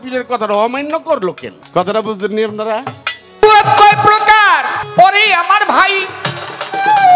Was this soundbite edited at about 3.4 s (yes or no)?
yes